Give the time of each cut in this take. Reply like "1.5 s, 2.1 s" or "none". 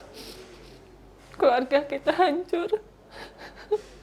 none